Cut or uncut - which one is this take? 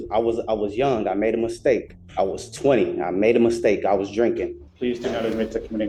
cut